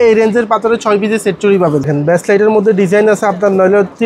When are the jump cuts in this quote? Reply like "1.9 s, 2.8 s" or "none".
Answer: 1.9 s